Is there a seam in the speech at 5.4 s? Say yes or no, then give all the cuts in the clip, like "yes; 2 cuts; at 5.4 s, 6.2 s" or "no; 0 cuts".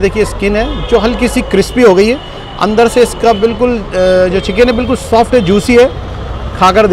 no; 0 cuts